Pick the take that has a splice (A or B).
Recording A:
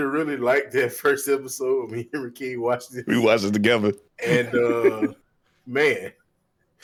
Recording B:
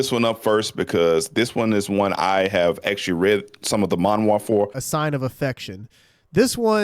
B